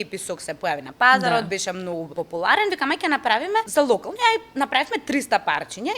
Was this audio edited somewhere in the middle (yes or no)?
yes